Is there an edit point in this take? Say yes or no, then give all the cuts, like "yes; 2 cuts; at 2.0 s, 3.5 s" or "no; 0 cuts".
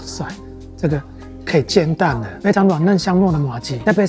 yes; 1 cut; at 2.3 s